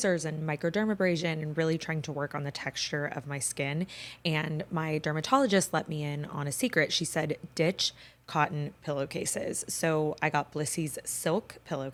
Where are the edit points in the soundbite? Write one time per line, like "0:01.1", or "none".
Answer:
none